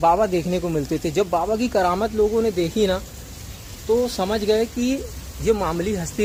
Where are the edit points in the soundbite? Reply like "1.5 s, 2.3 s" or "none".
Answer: none